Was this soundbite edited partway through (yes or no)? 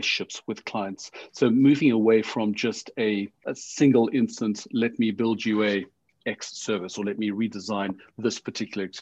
yes